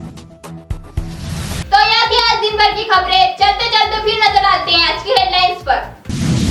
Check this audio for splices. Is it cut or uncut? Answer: uncut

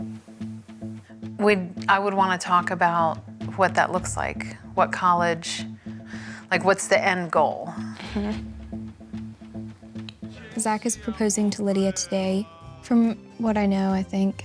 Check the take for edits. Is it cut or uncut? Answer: cut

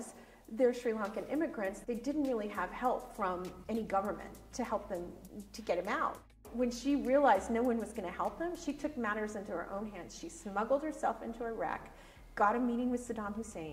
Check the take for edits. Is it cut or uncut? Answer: cut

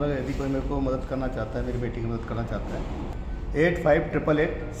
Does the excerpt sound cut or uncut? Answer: uncut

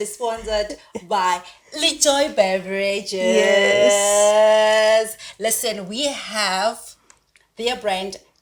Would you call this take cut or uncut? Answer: uncut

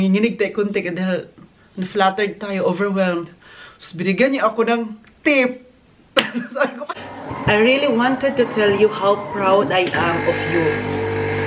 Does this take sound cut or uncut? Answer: cut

